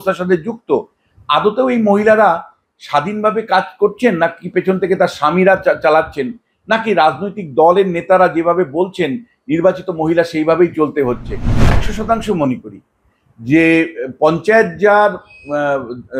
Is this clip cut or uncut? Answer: cut